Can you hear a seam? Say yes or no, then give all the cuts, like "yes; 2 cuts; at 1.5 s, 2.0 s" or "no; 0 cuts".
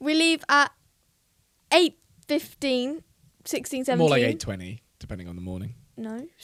no; 0 cuts